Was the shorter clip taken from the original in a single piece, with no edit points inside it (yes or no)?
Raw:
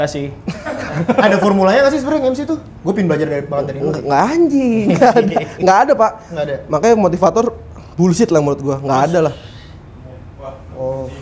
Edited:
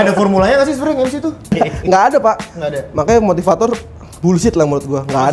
no